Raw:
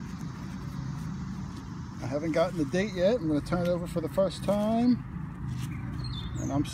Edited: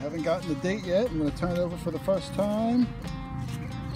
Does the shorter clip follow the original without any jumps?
yes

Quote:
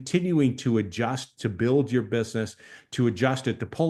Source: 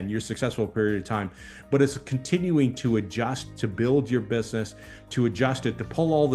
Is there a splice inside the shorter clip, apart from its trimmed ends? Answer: no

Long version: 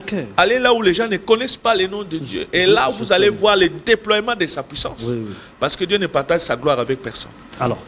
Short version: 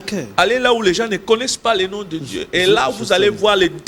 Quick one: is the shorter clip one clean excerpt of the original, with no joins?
yes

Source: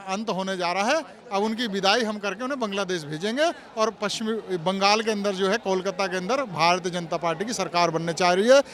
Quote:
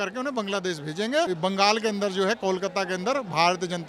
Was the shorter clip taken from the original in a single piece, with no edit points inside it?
no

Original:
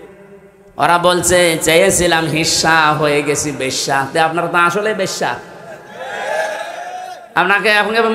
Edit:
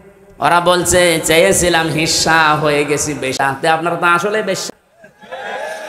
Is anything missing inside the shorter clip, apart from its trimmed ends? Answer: yes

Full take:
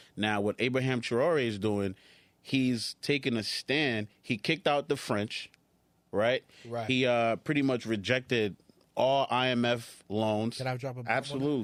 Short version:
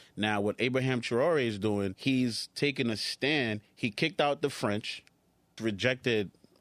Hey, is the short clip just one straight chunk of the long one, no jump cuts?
no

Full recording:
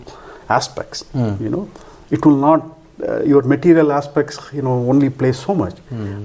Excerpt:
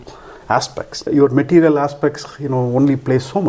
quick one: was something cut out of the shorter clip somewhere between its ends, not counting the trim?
yes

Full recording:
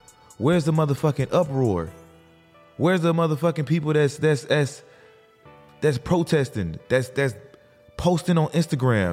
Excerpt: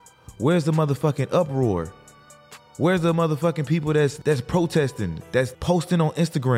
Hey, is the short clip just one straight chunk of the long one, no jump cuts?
no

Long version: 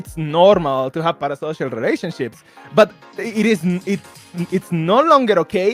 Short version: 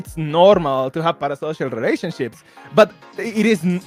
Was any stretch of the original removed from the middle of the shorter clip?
no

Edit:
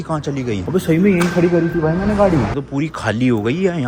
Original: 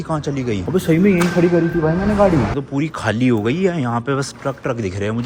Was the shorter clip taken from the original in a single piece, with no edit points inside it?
yes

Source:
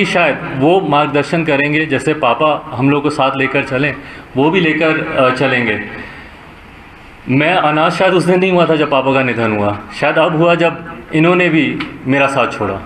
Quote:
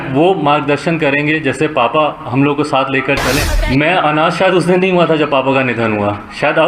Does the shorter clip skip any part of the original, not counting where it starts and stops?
yes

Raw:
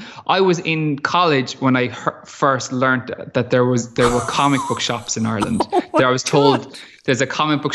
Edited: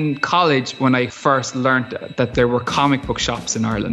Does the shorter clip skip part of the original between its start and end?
yes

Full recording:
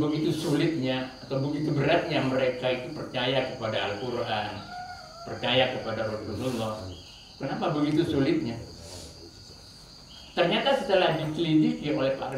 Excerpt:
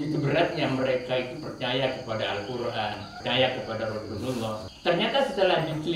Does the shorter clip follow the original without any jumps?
no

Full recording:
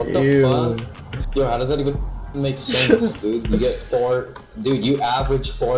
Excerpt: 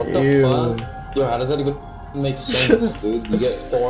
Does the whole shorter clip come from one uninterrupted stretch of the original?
no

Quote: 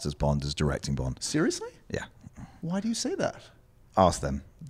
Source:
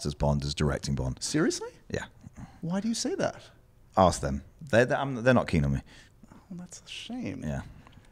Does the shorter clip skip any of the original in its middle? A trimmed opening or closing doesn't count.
no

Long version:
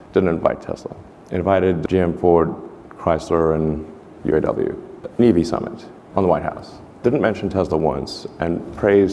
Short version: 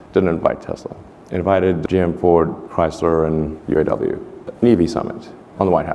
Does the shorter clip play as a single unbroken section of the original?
no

